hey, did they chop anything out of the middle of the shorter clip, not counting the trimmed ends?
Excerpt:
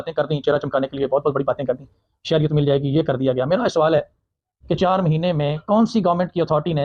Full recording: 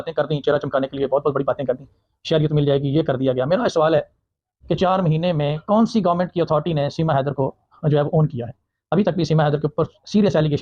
no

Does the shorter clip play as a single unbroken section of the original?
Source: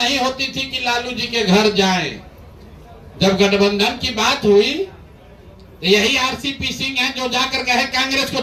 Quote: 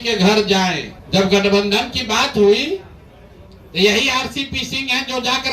no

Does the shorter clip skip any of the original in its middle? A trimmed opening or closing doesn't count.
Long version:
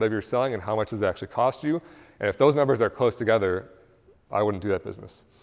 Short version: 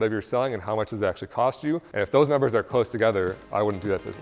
yes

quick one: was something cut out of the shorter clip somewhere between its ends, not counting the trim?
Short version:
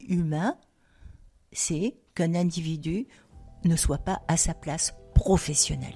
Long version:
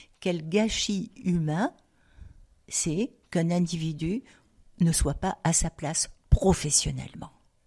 no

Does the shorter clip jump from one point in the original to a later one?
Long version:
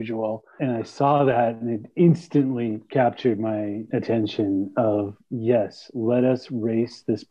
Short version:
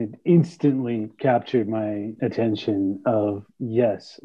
no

